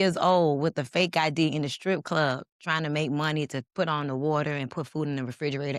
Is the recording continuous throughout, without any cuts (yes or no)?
yes